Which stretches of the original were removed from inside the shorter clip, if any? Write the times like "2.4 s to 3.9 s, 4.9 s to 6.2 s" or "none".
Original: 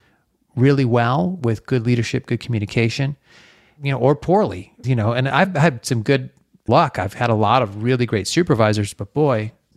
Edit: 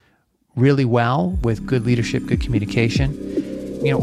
none